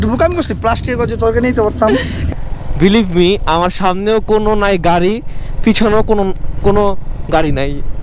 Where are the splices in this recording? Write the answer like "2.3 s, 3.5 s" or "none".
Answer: 2.2 s